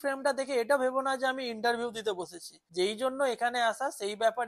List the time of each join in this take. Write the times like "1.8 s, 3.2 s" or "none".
none